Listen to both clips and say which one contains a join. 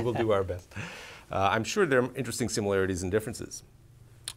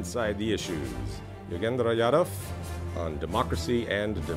first; 1 cut; at 1.2 s

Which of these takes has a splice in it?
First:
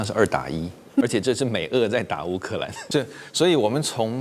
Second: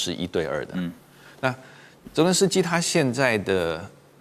first; 2 cuts; at 1.0 s, 2.8 s

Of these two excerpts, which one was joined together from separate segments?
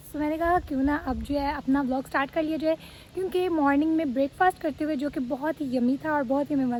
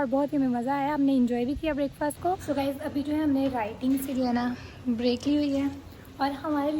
second; 1 cut; at 2.7 s

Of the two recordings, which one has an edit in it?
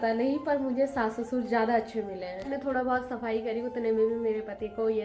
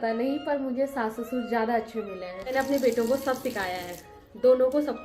second; 1 cut; at 2.5 s

